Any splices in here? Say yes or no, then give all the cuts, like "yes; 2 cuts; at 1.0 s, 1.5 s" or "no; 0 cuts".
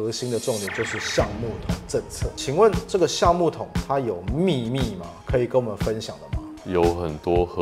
no; 0 cuts